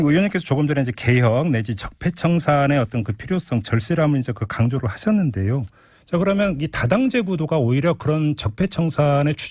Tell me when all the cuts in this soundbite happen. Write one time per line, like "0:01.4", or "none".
none

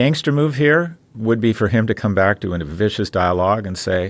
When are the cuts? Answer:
none

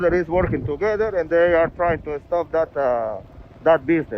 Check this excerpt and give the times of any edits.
none

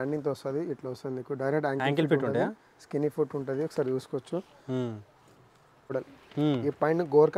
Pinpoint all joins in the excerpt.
0:05.9

